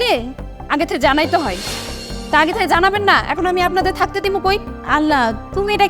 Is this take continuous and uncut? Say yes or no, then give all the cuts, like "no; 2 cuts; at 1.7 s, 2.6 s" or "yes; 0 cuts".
yes; 0 cuts